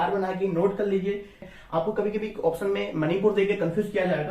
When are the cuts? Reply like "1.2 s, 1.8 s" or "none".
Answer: 1.5 s